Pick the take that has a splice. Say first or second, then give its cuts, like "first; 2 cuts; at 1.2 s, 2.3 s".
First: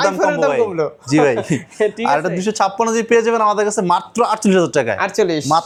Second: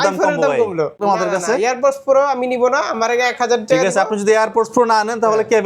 second; 1 cut; at 1.0 s